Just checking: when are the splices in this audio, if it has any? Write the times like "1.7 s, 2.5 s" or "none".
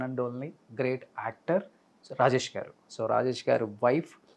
2.9 s